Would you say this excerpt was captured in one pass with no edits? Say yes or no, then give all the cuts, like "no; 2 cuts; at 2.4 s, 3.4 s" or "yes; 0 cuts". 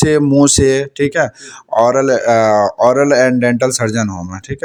yes; 0 cuts